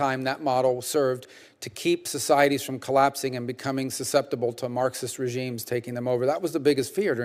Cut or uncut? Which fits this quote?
uncut